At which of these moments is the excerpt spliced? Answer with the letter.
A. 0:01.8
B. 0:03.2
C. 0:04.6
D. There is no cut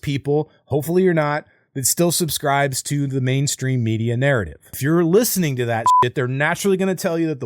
C